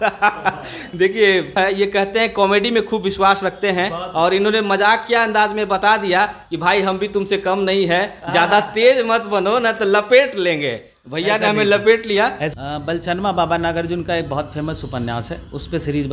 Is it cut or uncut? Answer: cut